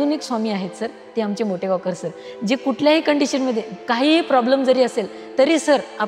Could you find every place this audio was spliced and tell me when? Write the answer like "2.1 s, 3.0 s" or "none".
3.7 s